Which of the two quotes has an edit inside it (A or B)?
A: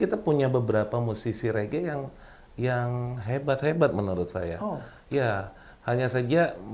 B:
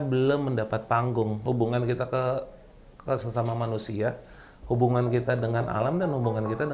B